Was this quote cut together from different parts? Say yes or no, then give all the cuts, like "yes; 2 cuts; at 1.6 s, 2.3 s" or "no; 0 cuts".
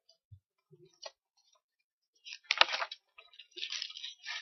no; 0 cuts